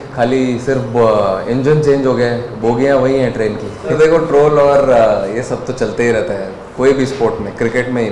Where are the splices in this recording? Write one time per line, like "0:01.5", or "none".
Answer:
none